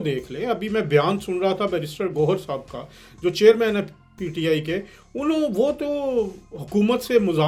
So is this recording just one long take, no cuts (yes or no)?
yes